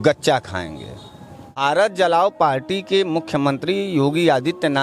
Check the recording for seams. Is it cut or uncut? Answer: cut